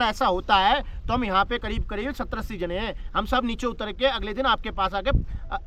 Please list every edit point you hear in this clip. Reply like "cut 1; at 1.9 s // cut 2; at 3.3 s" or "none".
none